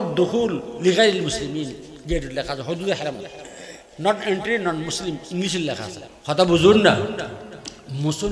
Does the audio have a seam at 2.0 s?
no; 1 cut; at 6.0 s

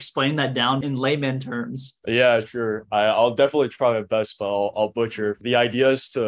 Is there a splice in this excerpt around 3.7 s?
no; 3 cuts; at 0.8 s, 1.9 s, 5.4 s

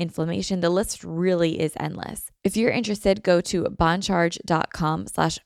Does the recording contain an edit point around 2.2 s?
yes; 1 cut; at 2.2 s

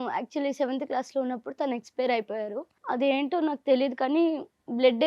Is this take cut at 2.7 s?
yes; 1 cut; at 2.7 s

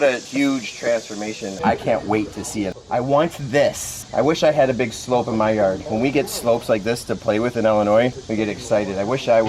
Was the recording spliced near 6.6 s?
no; 2 cuts; at 1.6 s, 2.8 s

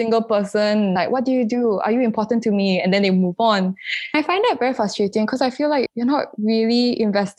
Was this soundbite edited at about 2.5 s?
no; 3 cuts; at 1.0 s, 4.1 s, 5.9 s

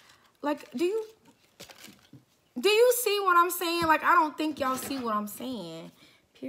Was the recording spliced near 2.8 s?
no; 0 cuts

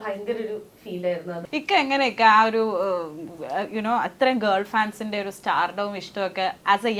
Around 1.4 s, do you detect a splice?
yes; 1 cut; at 1.4 s

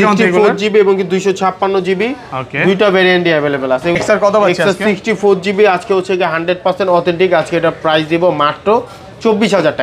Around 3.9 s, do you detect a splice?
yes; 1 cut; at 3.9 s

